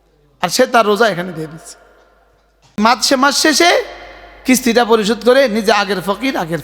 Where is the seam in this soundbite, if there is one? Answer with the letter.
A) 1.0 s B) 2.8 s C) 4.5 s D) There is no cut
B